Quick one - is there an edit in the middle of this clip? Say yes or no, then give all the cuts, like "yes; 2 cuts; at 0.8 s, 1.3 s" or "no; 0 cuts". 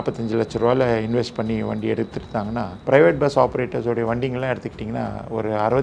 yes; 1 cut; at 2.7 s